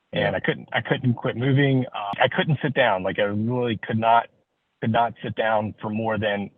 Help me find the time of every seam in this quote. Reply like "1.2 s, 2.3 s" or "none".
2.1 s